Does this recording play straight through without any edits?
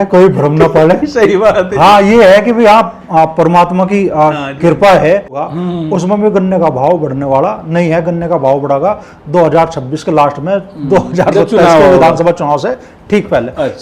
no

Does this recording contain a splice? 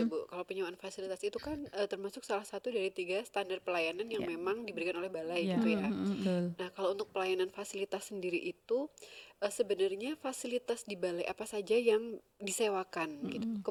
no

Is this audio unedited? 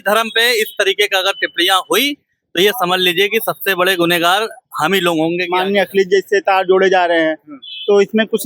no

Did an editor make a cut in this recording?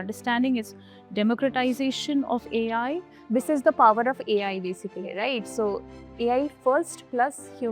yes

